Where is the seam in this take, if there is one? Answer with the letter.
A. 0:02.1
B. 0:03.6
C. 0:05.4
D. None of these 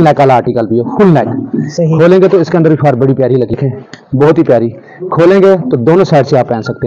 B